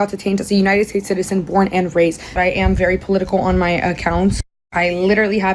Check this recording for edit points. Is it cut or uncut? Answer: cut